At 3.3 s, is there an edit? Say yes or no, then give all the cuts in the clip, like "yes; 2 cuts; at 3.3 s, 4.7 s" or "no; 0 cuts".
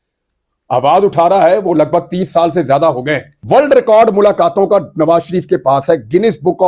yes; 1 cut; at 3.3 s